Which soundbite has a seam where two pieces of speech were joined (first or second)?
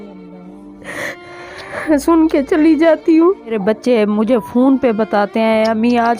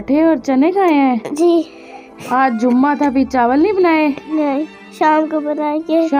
first